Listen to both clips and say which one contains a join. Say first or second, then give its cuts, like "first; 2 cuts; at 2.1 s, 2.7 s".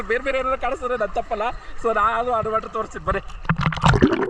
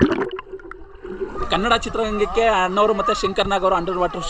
second; 1 cut; at 1.4 s